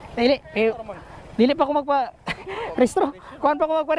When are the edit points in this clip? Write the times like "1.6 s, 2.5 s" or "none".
none